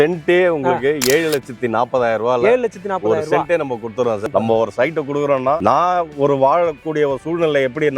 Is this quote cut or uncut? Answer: cut